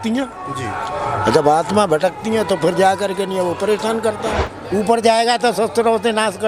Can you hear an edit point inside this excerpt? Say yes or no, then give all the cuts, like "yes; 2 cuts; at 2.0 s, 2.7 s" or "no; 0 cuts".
yes; 1 cut; at 4.4 s